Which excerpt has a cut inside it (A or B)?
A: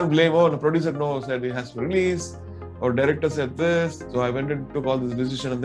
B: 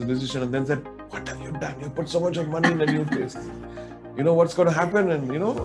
A